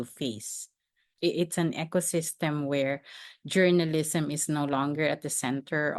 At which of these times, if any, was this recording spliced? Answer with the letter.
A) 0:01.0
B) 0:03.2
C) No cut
C